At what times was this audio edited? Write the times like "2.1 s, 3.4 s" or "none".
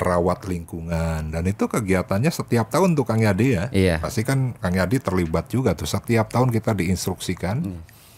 none